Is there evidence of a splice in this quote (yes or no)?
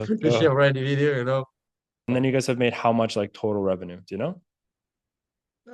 yes